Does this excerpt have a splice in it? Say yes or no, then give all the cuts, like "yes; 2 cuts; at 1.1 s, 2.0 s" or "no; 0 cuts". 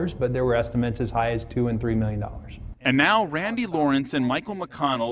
no; 0 cuts